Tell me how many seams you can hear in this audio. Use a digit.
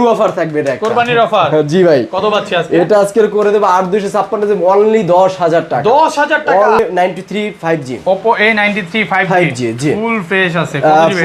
1